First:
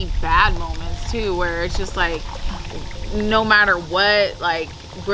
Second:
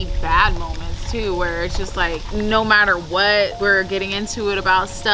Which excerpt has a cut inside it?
second; 2 cuts; at 2.2 s, 3.5 s

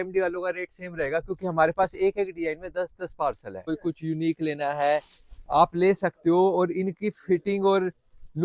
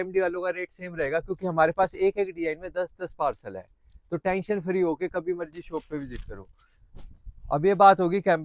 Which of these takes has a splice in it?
first; 1 cut; at 3.7 s

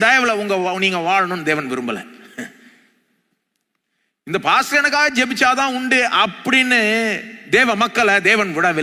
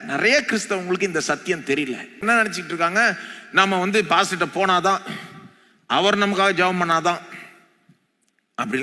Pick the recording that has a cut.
second; 1 cut; at 2.2 s

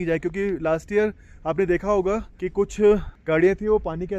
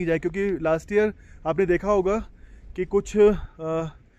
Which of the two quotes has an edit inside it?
first; 2 cuts; at 2.4 s, 3.1 s

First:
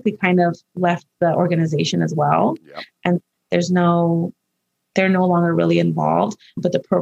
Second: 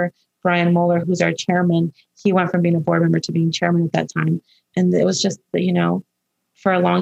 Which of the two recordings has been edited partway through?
second; 1 cut; at 1.0 s

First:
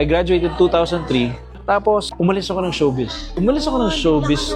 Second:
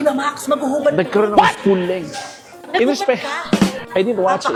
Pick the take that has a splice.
first; 1 cut; at 3.3 s

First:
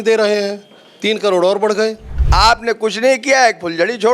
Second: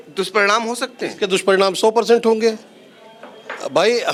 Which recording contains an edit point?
first; 1 cut; at 2.1 s

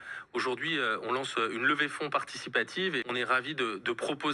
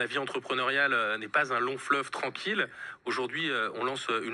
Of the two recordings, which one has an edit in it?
first; 1 cut; at 3.0 s

